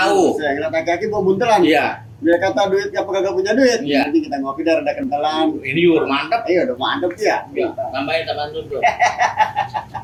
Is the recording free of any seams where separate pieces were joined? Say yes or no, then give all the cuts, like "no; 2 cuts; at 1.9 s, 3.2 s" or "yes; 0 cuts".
yes; 0 cuts